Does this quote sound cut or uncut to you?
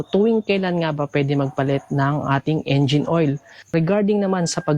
cut